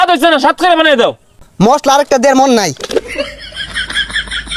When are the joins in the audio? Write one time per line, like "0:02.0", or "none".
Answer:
0:01.4
0:03.2